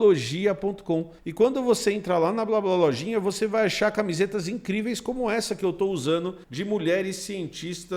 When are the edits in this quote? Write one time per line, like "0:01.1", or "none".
0:01.2
0:06.5